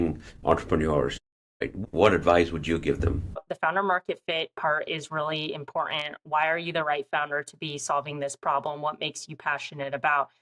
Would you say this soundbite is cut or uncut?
cut